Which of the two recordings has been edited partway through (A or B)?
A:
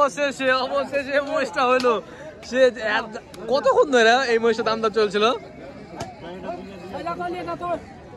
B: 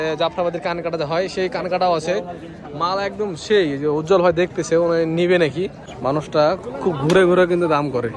B